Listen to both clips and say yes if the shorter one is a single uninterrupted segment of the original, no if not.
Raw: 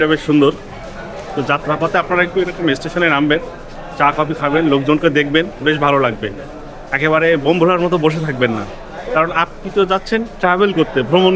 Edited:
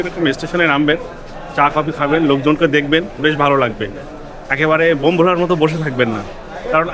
yes